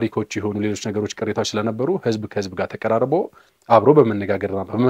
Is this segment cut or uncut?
uncut